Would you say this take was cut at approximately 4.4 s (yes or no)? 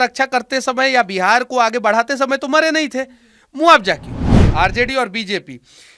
yes